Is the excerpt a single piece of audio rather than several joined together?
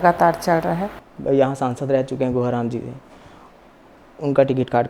yes; 0 cuts

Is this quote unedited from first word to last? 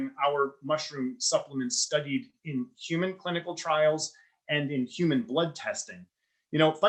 yes; 0 cuts

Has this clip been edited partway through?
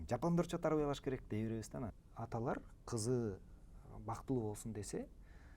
yes; 1 cut; at 1.8 s

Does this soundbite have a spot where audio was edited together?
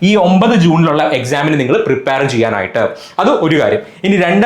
no; 0 cuts

